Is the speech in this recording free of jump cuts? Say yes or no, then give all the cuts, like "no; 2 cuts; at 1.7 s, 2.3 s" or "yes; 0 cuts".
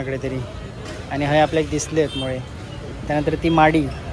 yes; 0 cuts